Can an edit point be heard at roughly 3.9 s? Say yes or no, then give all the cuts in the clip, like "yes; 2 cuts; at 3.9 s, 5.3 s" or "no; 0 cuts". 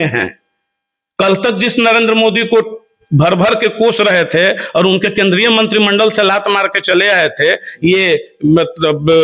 no; 0 cuts